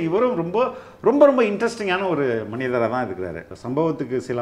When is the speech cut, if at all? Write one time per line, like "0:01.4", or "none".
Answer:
0:03.5